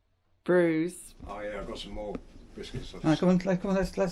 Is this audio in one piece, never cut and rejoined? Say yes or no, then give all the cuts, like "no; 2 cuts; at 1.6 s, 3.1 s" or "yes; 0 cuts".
no; 1 cut; at 1.1 s